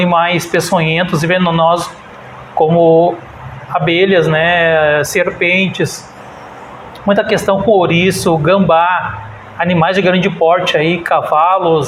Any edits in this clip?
no; 0 cuts

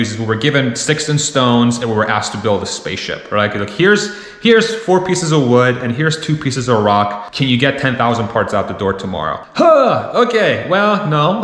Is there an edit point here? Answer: no; 0 cuts

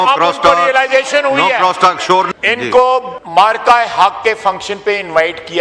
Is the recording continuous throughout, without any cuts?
no; 2 cuts; at 2.3 s, 3.2 s

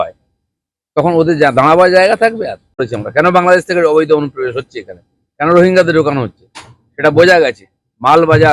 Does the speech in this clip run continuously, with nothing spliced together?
no; 1 cut; at 2.9 s

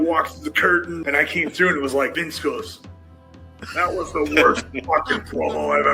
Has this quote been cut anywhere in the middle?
yes; 2 cuts; at 0.9 s, 2.1 s

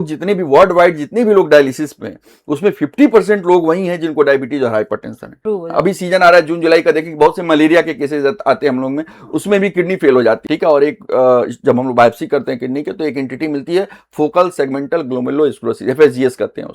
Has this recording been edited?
yes; 2 cuts; at 5.3 s, 10.4 s

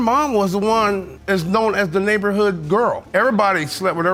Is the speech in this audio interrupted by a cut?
no; 0 cuts

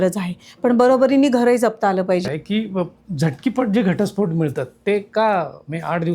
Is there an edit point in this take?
yes; 1 cut; at 2.3 s

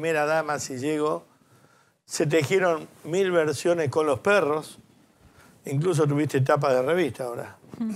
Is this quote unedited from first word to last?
yes; 0 cuts

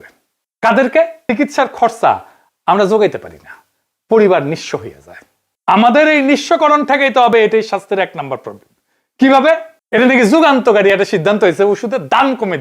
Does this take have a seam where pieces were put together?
yes; 2 cuts; at 1.2 s, 9.7 s

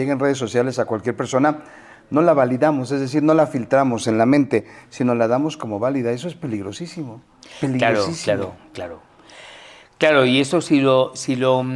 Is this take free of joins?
yes; 0 cuts

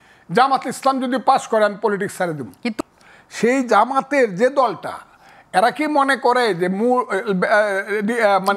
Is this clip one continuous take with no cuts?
no; 1 cut; at 2.8 s

